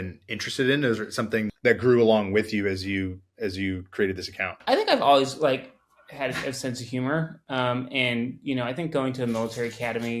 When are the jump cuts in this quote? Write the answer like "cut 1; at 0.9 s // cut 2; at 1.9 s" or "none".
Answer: cut 1; at 1.5 s // cut 2; at 4.6 s